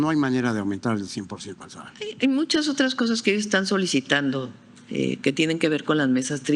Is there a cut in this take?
no; 0 cuts

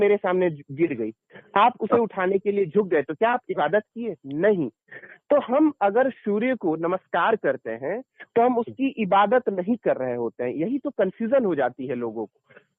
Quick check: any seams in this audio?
no; 0 cuts

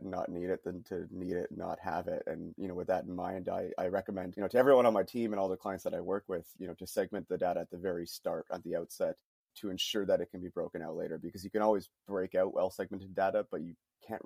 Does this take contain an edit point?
yes; 2 cuts; at 4.3 s, 9.5 s

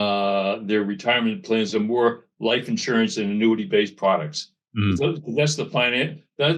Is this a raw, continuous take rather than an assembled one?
yes; 0 cuts

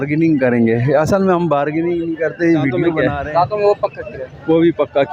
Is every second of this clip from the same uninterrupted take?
no; 1 cut; at 3.0 s

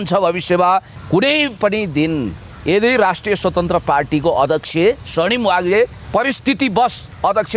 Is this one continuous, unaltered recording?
no; 2 cuts; at 1.0 s, 6.0 s

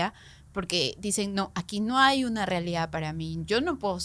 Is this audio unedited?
yes; 0 cuts

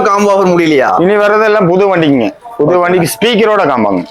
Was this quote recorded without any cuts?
yes; 0 cuts

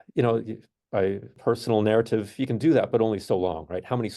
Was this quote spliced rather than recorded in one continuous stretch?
yes; 1 cut; at 1.3 s

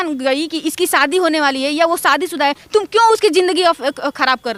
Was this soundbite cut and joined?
no; 0 cuts

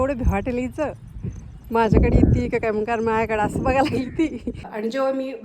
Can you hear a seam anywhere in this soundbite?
yes; 1 cut; at 4.5 s

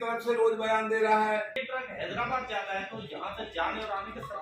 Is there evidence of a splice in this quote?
yes; 1 cut; at 1.6 s

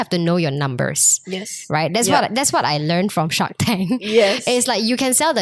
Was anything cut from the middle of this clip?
no; 0 cuts

